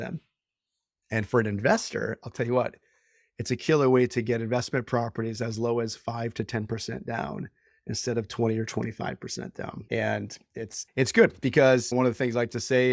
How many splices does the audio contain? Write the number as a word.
three